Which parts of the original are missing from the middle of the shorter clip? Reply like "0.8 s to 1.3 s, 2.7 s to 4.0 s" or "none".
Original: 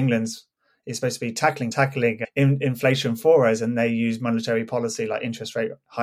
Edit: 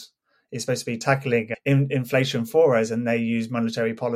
1.4 s to 1.7 s